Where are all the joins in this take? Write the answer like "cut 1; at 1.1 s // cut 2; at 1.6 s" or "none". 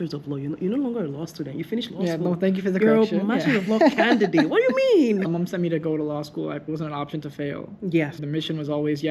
cut 1; at 5.2 s // cut 2; at 6.7 s // cut 3; at 8.2 s